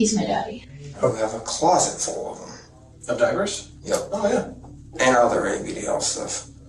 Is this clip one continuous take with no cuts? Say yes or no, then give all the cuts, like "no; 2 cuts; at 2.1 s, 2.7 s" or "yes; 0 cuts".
no; 2 cuts; at 1.1 s, 5.0 s